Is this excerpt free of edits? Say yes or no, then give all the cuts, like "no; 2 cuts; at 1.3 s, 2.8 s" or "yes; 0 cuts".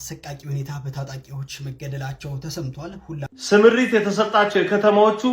no; 1 cut; at 3.4 s